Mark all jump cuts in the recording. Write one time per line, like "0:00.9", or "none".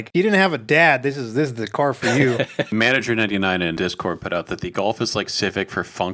0:02.7
0:03.8

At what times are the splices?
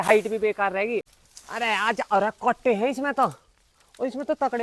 0:01.2

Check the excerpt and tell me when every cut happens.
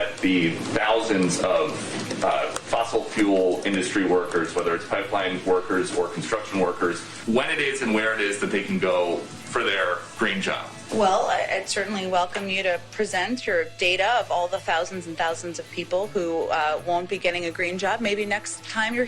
0:07.1
0:10.7

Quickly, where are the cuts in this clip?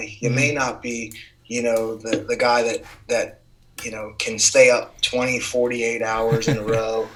none

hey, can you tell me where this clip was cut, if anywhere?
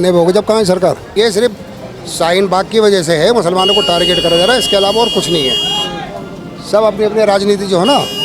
0:01.1

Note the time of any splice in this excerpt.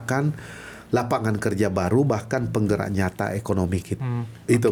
none

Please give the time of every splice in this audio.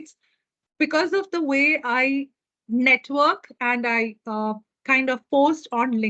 none

